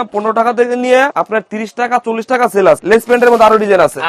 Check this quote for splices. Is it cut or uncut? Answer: cut